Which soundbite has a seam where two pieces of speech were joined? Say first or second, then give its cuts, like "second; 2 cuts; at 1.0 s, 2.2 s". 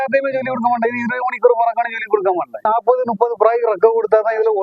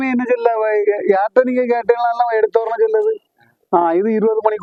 first; 1 cut; at 2.6 s